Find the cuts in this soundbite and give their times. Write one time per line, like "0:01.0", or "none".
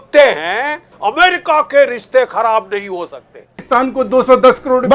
0:00.9
0:03.6